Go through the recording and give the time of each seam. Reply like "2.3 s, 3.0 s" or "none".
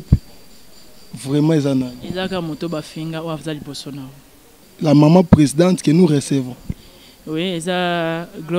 4.7 s